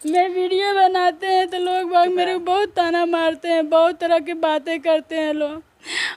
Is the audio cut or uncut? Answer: uncut